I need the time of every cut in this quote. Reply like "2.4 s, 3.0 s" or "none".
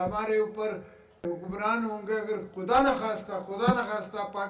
1.2 s